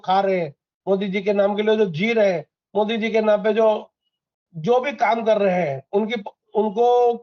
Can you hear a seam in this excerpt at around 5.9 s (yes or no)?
no